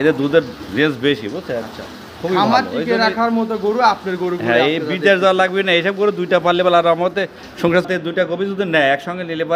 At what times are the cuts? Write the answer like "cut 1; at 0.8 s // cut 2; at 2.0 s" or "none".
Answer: cut 1; at 7.9 s